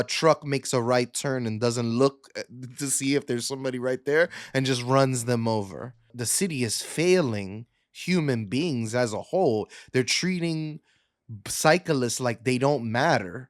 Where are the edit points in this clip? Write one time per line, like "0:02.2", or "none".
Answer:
0:06.2